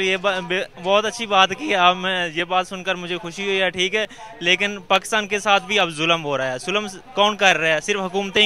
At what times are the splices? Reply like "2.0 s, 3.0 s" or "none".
none